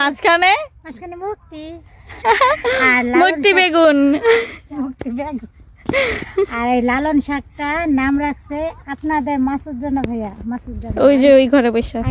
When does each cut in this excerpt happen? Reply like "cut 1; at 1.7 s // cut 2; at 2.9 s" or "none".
none